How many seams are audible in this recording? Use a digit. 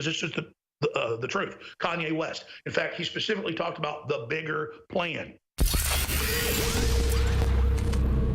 1